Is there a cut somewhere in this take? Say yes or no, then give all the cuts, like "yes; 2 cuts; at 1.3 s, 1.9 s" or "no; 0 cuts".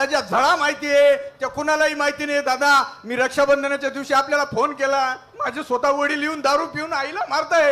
no; 0 cuts